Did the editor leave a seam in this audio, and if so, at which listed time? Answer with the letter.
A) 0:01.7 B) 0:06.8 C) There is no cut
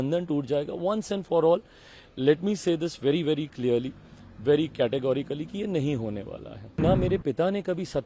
B